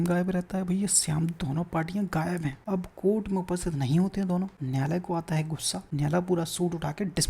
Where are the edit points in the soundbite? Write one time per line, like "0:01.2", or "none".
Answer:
0:02.6
0:04.6
0:05.8